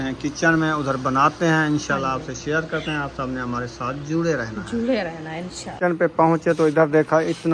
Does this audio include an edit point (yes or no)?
no